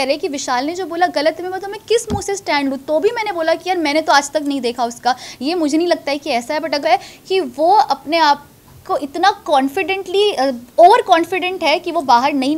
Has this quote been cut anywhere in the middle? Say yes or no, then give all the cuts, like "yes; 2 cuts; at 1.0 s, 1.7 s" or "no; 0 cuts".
yes; 1 cut; at 6.8 s